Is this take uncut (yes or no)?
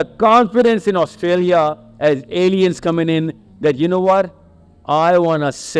yes